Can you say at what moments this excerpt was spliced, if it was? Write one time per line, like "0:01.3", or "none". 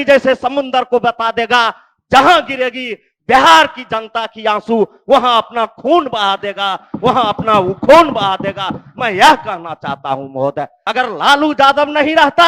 0:10.8